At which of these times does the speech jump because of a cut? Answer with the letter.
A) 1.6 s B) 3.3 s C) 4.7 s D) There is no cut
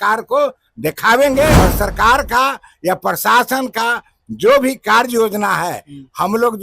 A